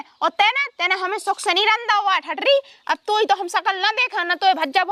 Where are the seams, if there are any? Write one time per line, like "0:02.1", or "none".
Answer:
none